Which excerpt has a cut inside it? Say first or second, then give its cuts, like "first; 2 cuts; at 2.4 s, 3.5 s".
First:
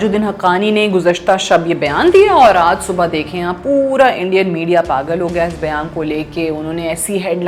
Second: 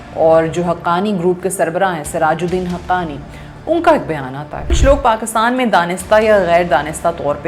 second; 1 cut; at 4.8 s